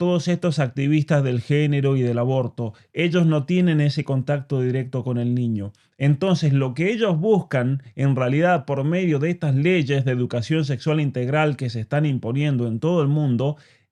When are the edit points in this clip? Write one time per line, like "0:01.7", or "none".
none